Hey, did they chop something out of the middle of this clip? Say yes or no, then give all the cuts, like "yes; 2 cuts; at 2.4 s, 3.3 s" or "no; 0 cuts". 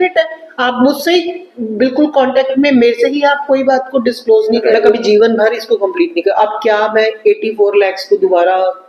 yes; 1 cut; at 5.0 s